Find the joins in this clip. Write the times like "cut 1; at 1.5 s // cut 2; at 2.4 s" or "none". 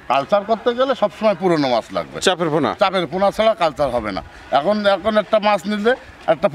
none